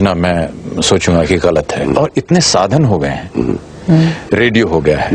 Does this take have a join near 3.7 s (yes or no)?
no